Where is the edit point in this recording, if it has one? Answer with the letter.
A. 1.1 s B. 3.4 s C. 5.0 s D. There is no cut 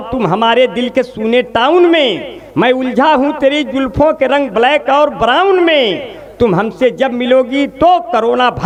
D